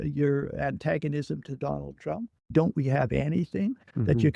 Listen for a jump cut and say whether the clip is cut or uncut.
cut